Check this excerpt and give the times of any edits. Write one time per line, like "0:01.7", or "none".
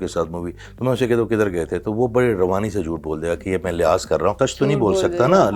0:04.4